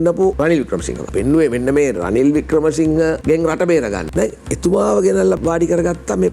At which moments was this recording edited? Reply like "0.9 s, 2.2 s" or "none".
0.8 s, 3.2 s, 4.0 s, 5.4 s